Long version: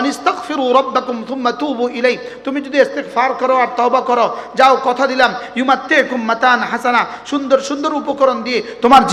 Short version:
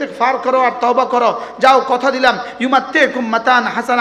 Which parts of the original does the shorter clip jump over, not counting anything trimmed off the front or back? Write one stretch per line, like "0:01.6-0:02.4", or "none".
none